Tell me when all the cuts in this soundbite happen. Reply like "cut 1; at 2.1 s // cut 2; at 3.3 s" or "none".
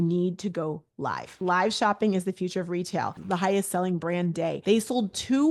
cut 1; at 1.3 s // cut 2; at 3.2 s // cut 3; at 4.6 s